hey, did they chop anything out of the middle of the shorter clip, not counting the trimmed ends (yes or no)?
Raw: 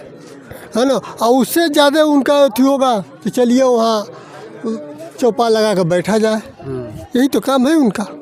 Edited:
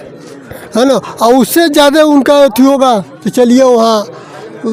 no